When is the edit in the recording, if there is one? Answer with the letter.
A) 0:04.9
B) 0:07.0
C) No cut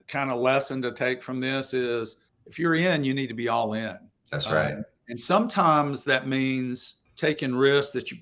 C